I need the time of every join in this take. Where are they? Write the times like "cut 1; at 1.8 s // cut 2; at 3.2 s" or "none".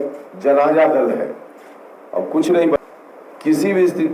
cut 1; at 2.8 s